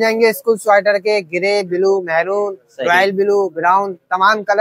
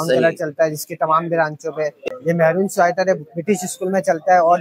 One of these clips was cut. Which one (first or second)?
second